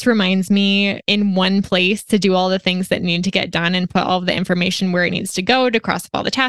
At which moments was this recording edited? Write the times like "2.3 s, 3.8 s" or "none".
1.0 s